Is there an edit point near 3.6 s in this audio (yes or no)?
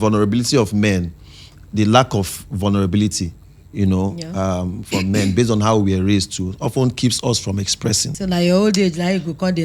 no